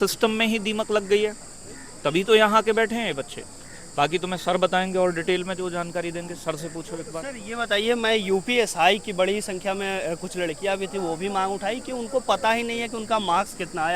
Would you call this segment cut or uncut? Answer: uncut